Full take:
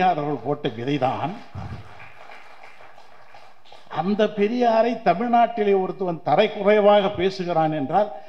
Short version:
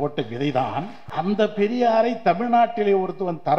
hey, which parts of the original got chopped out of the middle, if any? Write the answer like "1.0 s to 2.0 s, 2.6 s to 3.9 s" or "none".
1.5 s to 3.8 s

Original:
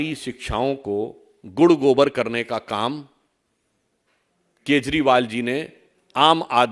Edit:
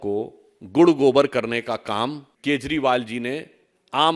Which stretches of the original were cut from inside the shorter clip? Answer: 3.1 s to 4.5 s

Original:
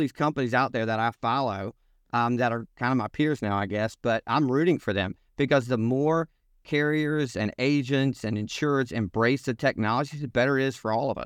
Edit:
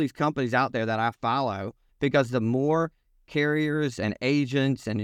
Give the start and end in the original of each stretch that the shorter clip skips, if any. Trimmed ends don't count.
1.8 s to 5.2 s

